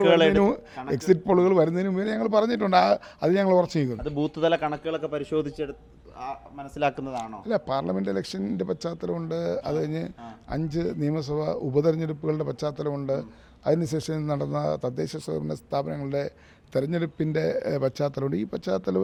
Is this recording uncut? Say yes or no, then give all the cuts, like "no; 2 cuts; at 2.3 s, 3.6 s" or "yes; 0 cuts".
yes; 0 cuts